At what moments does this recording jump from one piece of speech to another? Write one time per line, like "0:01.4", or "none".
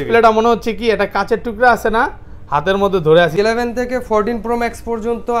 0:03.3